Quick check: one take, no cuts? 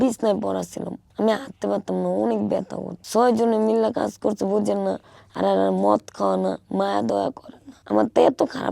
yes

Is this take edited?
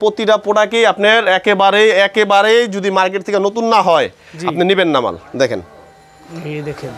no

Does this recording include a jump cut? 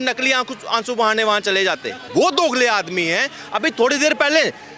yes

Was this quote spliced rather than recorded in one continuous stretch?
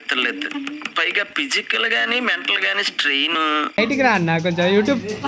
yes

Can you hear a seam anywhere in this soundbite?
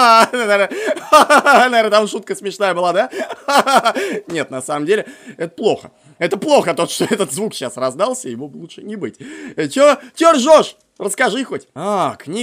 no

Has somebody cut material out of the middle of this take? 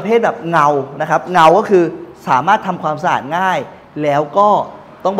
no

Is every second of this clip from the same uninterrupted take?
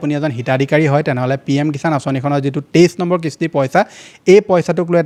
yes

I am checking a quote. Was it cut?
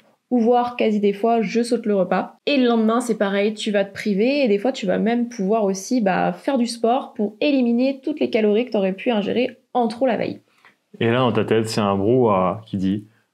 no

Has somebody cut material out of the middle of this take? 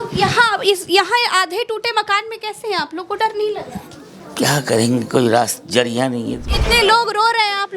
yes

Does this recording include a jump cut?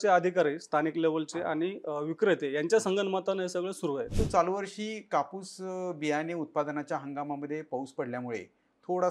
yes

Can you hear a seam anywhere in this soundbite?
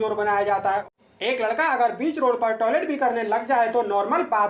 yes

